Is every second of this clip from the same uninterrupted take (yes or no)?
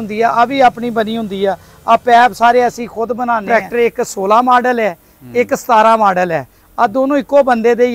no